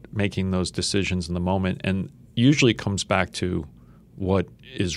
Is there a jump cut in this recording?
no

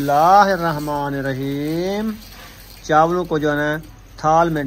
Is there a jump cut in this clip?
no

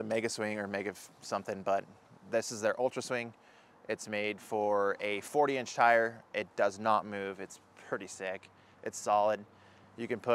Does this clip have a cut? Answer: no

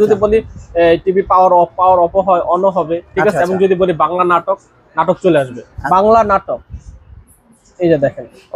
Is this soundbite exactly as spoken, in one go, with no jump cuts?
no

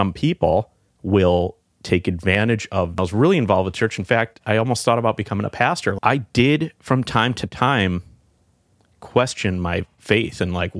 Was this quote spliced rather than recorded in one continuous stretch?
yes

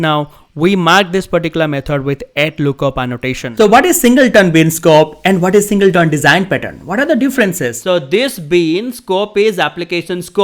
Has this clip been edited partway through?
yes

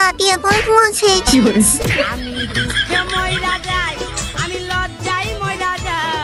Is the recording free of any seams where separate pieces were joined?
yes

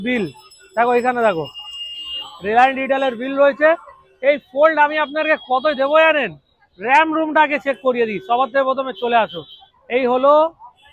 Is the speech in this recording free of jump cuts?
yes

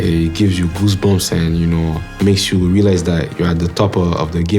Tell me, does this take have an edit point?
yes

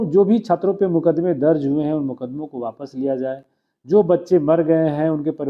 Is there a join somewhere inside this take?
no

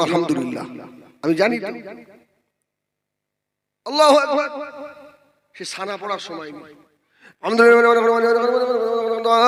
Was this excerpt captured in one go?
yes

